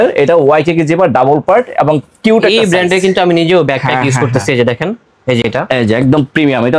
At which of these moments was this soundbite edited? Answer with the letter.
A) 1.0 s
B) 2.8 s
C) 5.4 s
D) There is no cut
D